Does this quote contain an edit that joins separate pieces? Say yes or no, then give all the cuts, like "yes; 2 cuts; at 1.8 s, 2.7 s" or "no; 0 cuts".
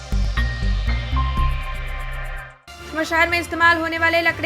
yes; 1 cut; at 2.2 s